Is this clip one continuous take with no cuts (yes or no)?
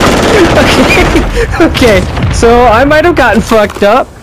yes